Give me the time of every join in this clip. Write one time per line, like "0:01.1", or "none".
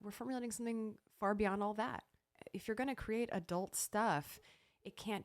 0:02.3